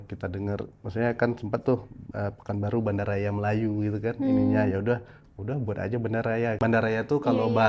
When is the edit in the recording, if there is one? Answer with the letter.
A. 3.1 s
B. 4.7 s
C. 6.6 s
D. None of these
C